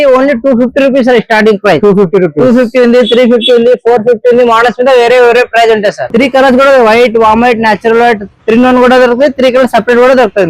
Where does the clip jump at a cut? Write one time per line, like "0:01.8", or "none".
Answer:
0:06.1